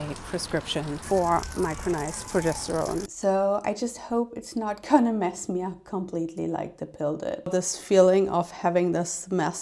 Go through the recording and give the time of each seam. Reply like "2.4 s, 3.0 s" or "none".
1.0 s, 3.1 s, 7.5 s